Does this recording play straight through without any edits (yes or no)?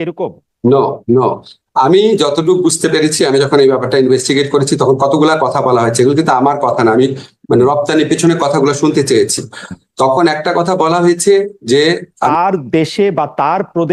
no